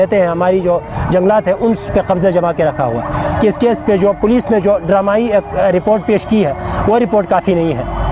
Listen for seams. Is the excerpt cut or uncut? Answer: cut